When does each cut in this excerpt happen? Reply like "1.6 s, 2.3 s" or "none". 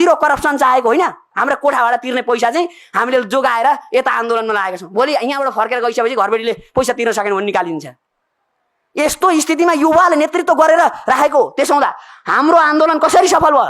1.3 s